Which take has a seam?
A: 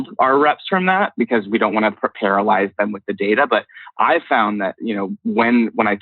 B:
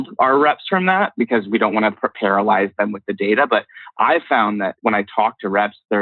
B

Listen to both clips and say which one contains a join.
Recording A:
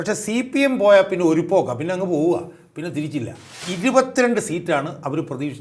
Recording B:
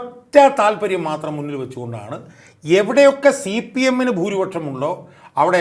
A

